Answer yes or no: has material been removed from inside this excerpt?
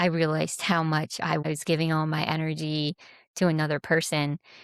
yes